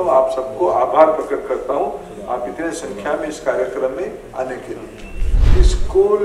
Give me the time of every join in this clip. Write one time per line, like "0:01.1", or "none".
0:05.3